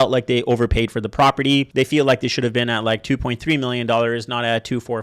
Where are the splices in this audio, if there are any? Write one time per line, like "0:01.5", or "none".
none